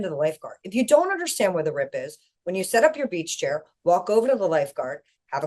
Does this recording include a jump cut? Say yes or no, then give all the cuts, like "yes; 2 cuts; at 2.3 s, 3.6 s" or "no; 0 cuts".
no; 0 cuts